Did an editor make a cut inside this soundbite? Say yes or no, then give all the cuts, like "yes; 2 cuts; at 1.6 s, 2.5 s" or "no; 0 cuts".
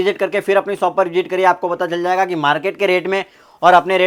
no; 0 cuts